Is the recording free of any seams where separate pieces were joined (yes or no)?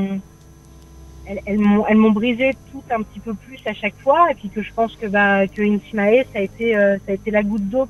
yes